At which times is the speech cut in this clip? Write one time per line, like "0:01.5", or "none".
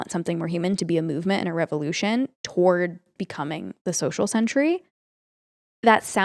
none